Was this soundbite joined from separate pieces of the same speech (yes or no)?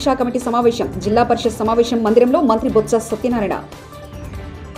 no